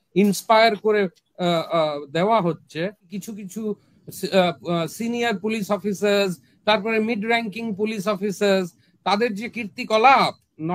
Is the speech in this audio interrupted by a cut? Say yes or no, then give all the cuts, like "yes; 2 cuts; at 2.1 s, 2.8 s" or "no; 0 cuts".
yes; 1 cut; at 3.1 s